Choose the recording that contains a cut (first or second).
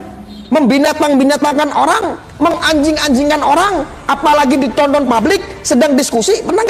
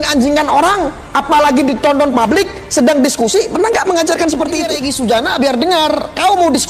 second